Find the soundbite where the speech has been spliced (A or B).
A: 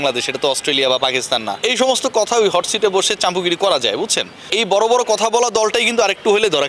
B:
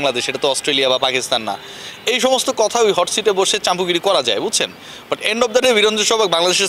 A